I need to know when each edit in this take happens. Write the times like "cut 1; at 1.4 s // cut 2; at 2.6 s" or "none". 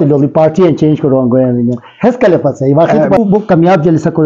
cut 1; at 3.2 s

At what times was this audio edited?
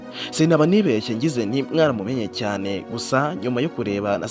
none

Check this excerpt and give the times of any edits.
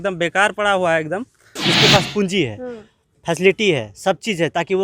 cut 1; at 1.6 s

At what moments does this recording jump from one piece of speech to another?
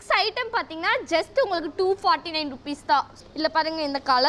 cut 1; at 3.1 s

